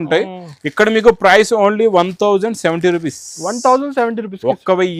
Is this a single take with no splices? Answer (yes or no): yes